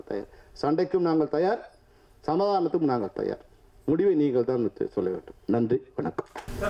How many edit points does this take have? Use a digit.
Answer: 0